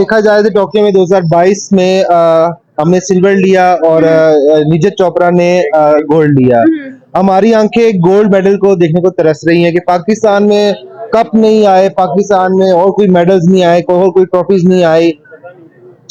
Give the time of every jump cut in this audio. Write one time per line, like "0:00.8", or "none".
none